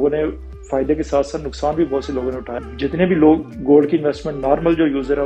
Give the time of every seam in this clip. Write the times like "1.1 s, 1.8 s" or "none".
2.5 s